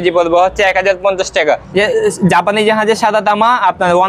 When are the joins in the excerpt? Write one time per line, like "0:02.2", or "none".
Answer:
0:01.6